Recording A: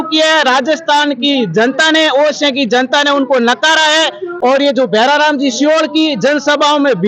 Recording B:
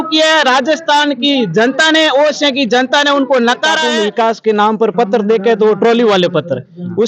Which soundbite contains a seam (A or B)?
B